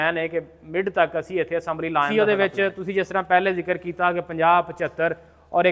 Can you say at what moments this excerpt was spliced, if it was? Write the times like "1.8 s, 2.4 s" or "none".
2.1 s

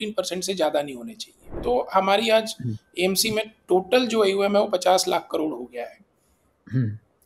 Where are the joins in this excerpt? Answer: 1.5 s

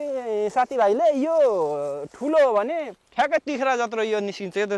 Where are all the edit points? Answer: 3.0 s

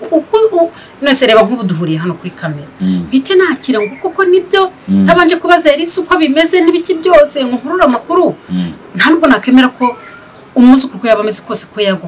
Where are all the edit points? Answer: none

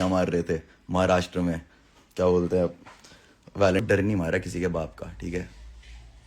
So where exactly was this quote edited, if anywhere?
3.8 s

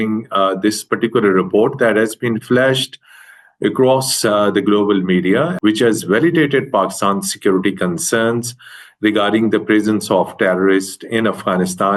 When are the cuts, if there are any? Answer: 5.5 s

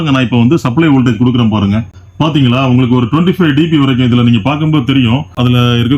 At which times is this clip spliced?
2.0 s

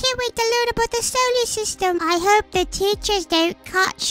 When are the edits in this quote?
2.0 s

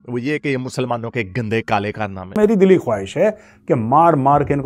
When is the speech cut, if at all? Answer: 2.4 s

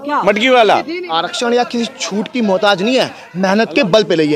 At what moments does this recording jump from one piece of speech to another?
1.0 s

